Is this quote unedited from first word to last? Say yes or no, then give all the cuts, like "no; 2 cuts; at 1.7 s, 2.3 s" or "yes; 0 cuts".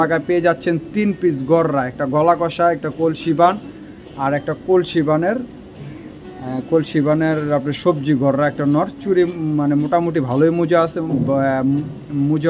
yes; 0 cuts